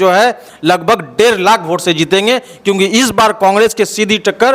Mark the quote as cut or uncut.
uncut